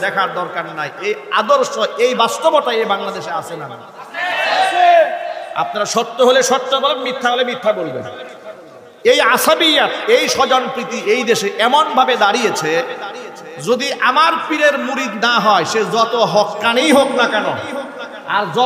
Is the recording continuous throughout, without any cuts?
yes; 0 cuts

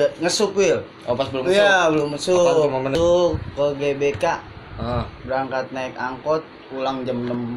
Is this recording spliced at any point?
yes; 1 cut; at 3.0 s

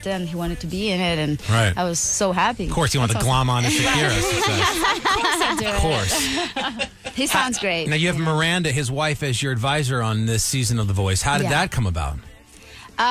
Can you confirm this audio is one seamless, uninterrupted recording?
yes; 0 cuts

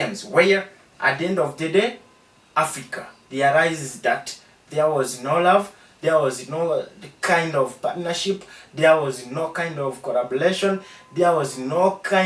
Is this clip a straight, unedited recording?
yes; 0 cuts

